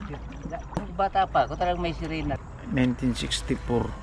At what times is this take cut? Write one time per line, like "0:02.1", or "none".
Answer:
0:00.9
0:02.5